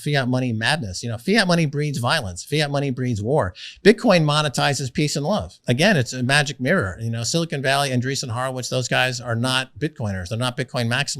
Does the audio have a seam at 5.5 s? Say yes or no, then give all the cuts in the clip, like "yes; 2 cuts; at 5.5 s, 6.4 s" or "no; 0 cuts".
yes; 1 cut; at 5.5 s